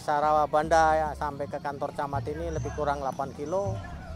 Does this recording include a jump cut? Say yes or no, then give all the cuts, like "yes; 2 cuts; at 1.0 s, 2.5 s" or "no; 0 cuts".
no; 0 cuts